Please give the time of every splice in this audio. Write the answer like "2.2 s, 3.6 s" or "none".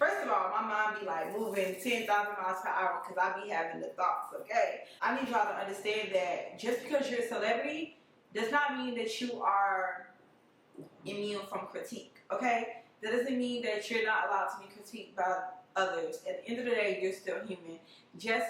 4.9 s